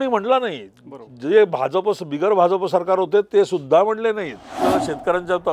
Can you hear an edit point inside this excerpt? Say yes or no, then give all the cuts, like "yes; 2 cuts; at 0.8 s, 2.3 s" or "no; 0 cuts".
yes; 1 cut; at 4.6 s